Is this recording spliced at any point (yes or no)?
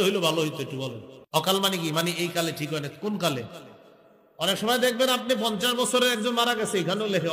yes